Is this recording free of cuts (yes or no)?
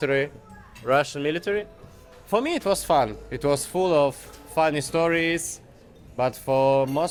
yes